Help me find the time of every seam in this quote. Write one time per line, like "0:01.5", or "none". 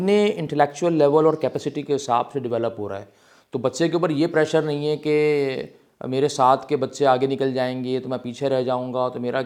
none